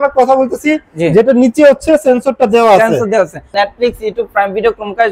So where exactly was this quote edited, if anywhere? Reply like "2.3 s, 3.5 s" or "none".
3.5 s